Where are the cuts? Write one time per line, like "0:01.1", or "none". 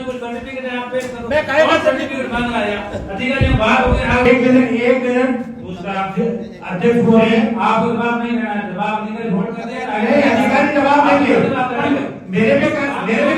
0:04.3